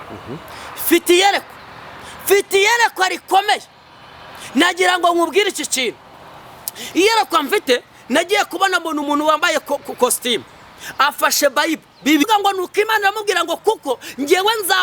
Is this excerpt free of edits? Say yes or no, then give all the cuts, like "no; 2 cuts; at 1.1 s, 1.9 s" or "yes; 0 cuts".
no; 1 cut; at 12.2 s